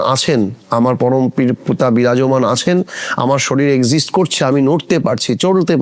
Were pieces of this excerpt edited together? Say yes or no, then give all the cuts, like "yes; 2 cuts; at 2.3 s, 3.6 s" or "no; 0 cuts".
no; 0 cuts